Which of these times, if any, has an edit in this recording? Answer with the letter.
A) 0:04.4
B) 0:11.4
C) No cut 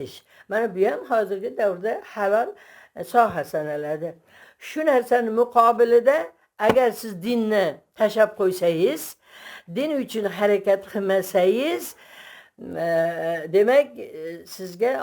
A